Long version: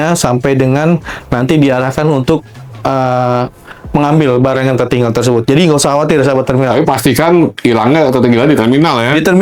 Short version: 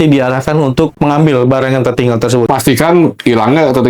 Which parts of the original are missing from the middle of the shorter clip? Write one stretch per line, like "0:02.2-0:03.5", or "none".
0:02.4-0:03.9
0:05.4-0:06.9